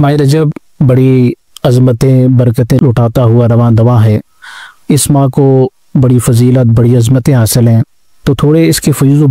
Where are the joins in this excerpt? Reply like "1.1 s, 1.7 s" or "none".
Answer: 2.8 s